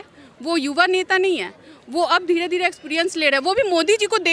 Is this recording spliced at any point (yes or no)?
no